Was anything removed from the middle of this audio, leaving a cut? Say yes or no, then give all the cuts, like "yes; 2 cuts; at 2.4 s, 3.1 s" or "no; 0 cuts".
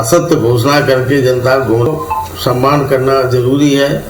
yes; 1 cut; at 1.9 s